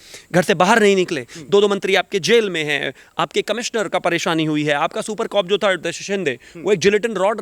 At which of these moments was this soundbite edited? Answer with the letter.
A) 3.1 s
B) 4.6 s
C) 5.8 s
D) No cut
C